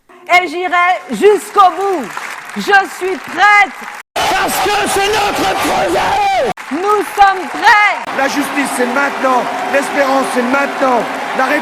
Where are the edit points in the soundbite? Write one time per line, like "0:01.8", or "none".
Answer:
0:02.4